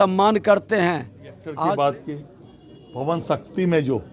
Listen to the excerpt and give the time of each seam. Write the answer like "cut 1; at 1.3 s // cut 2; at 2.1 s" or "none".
cut 1; at 1.4 s